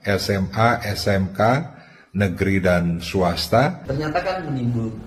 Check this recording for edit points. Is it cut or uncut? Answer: cut